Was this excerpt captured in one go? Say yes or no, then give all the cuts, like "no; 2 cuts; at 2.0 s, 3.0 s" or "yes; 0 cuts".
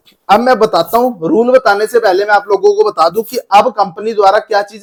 yes; 0 cuts